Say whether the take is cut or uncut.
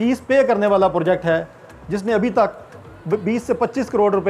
uncut